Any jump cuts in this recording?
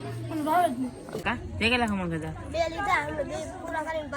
yes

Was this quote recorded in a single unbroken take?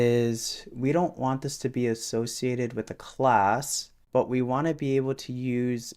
yes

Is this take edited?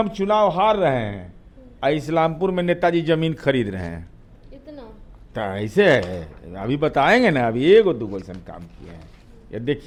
no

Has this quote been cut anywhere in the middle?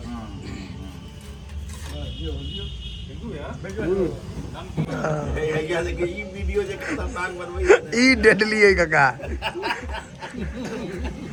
no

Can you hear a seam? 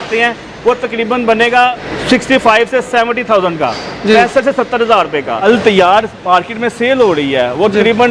yes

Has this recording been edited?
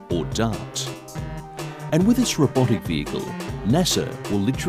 no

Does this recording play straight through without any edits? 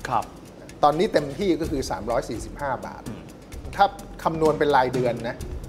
no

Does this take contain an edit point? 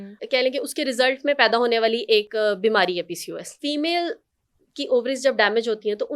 yes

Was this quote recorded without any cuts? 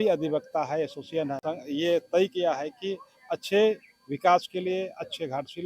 no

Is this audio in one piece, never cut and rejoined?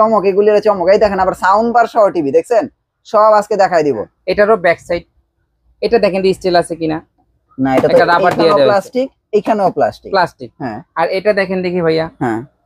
no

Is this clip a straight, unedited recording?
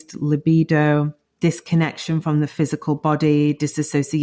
no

